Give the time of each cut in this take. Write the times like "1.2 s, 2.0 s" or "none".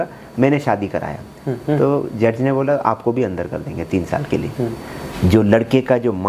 5.1 s